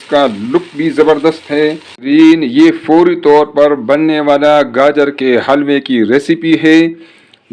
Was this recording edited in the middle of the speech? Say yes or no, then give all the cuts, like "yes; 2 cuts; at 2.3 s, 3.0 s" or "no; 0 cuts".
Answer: yes; 1 cut; at 1.9 s